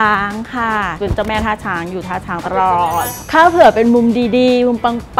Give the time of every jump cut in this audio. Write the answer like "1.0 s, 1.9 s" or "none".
0.9 s